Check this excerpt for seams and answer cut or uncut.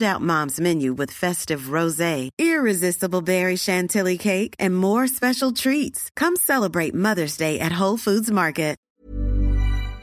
cut